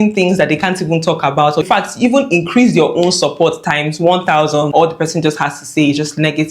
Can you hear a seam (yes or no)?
yes